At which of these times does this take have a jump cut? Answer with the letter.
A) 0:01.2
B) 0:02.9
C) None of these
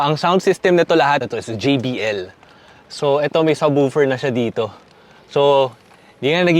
A